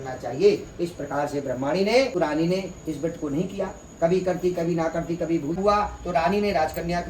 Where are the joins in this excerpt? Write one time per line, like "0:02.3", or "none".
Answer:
0:02.2
0:05.6